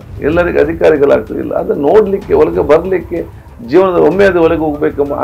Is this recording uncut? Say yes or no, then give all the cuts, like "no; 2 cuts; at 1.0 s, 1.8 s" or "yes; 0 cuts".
yes; 0 cuts